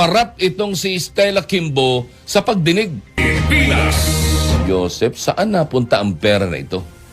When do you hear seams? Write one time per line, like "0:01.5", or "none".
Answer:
0:03.2